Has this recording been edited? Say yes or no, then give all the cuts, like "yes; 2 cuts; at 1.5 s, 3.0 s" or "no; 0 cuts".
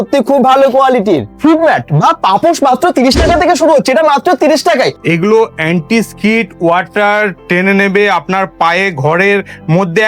yes; 2 cuts; at 1.3 s, 5.0 s